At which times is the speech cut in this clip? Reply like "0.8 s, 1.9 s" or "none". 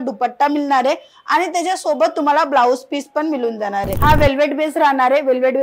3.9 s